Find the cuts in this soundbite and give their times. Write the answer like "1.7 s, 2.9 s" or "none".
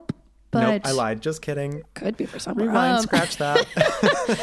none